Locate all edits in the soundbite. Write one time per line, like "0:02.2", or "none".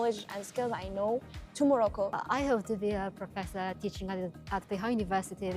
0:01.4
0:02.2